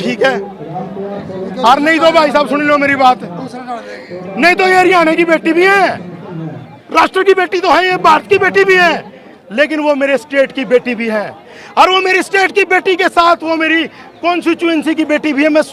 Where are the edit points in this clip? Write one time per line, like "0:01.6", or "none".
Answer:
none